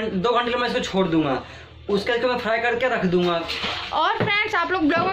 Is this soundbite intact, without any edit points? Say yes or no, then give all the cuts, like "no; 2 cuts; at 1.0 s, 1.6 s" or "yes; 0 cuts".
no; 1 cut; at 3.6 s